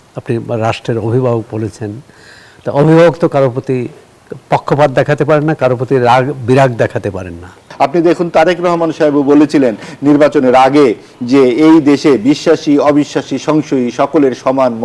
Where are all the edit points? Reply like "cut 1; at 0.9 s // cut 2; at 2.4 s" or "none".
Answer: cut 1; at 7.6 s